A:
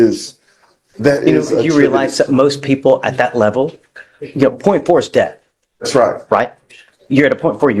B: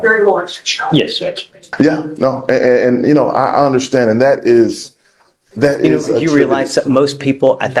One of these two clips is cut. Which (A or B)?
B